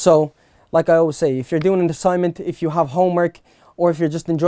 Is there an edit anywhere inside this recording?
no; 0 cuts

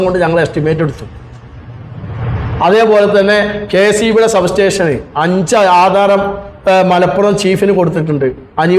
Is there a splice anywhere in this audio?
no; 0 cuts

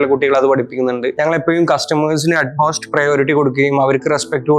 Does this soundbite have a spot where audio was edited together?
yes; 1 cut; at 1.1 s

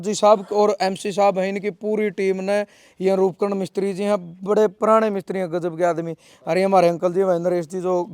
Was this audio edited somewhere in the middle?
no; 0 cuts

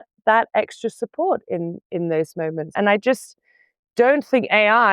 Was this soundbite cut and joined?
yes; 1 cut; at 2.7 s

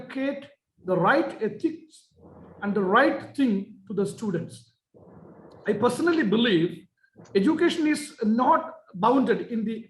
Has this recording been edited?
no; 0 cuts

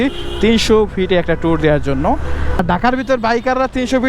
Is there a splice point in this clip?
yes; 1 cut; at 2.6 s

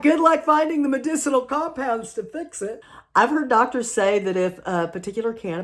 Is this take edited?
yes; 1 cut; at 2.9 s

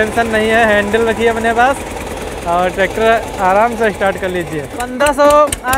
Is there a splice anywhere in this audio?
yes; 1 cut; at 4.8 s

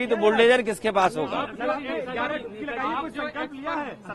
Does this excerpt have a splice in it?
no; 0 cuts

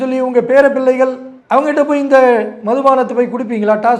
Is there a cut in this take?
no; 0 cuts

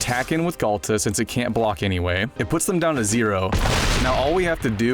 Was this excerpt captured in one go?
no; 1 cut; at 2.3 s

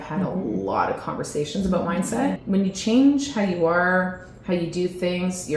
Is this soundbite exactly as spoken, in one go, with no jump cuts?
no; 1 cut; at 2.4 s

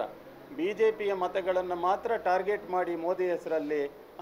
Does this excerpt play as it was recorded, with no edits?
yes; 0 cuts

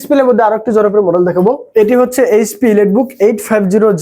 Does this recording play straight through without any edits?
no; 1 cut; at 1.6 s

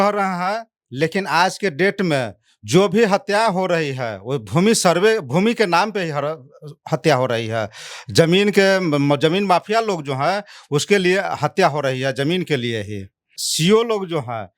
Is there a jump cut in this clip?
yes; 1 cut; at 13.4 s

